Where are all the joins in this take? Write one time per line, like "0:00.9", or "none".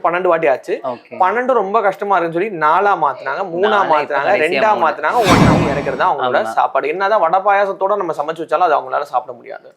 0:05.5